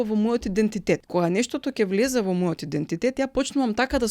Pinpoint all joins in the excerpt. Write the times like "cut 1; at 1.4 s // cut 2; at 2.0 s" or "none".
cut 1; at 1.1 s